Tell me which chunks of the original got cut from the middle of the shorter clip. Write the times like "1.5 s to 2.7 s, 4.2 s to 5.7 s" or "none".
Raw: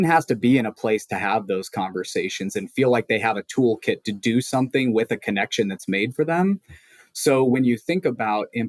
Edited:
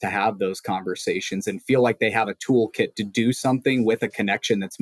none

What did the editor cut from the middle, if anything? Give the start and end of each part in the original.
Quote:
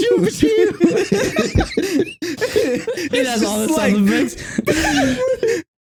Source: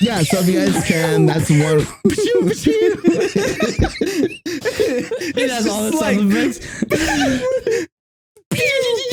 none

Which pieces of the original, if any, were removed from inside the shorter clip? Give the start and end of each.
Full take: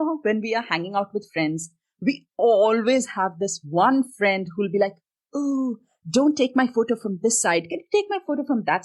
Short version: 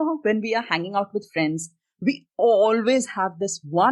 none

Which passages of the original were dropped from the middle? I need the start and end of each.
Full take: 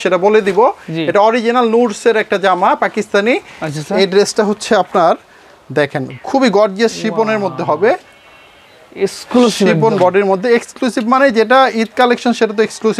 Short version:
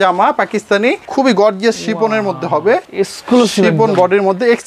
3.5 s to 6.2 s, 8.0 s to 8.9 s

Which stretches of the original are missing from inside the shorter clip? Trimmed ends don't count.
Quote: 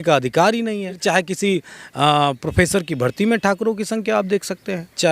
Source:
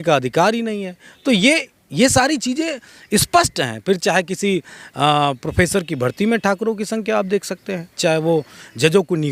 1.0 s to 4.0 s

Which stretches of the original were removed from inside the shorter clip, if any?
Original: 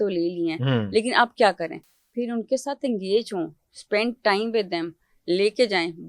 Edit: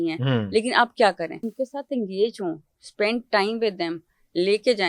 1.9 s to 2.4 s

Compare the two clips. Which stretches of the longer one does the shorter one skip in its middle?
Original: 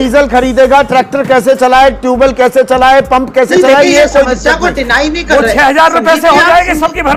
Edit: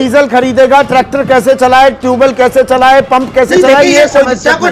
none

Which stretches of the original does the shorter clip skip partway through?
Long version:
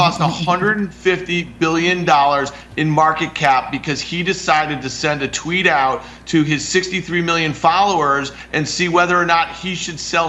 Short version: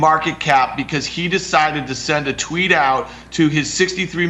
none

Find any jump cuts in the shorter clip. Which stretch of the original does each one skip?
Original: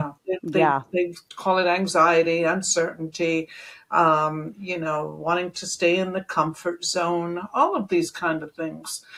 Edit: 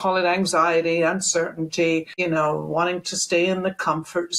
3.5 s to 4.6 s

